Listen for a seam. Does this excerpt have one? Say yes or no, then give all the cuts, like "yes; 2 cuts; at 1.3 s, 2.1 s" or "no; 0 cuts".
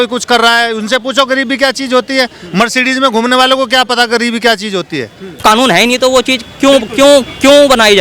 yes; 1 cut; at 5.2 s